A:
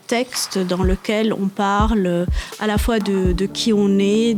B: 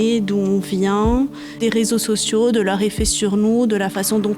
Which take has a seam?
B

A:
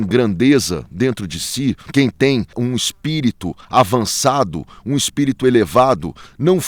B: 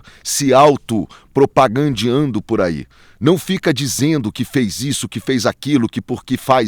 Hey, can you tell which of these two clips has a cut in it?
A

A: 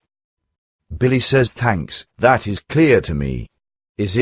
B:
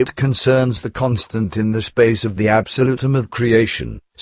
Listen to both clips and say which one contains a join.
A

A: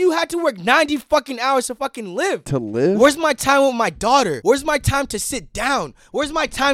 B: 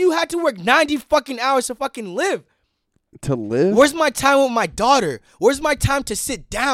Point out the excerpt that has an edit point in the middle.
A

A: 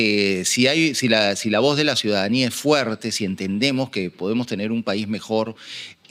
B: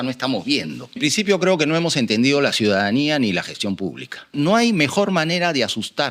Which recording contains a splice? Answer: B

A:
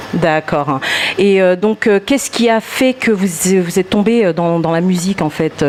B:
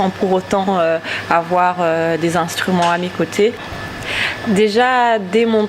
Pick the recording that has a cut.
B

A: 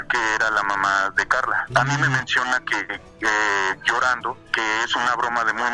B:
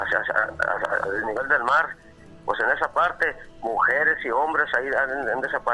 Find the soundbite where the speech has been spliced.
A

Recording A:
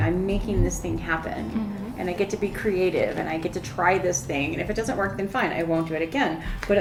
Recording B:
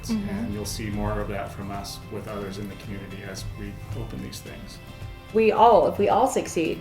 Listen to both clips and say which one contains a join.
B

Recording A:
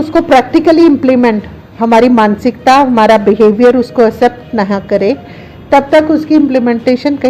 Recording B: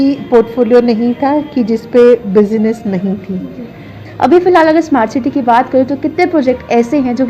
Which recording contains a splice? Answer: B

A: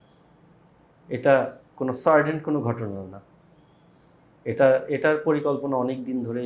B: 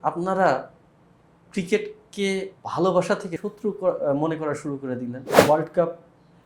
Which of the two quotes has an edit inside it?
B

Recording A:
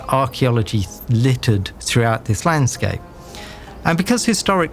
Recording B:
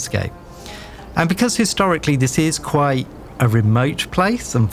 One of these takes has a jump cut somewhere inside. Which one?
A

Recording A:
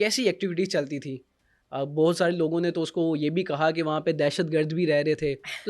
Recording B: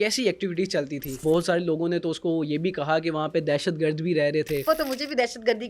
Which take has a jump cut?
B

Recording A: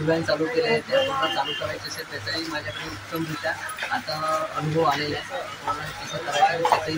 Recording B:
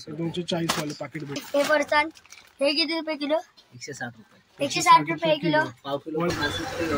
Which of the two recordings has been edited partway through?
B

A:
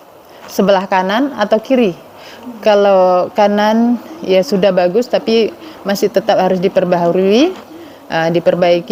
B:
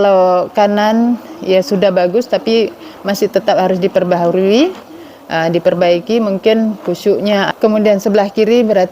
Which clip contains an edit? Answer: B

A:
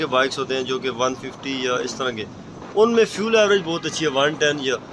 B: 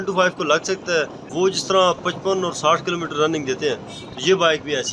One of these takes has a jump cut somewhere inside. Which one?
B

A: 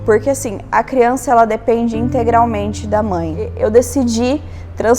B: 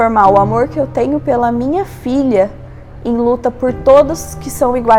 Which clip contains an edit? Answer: A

